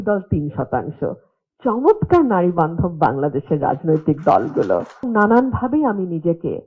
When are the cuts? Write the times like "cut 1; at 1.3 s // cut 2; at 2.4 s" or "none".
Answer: cut 1; at 5.1 s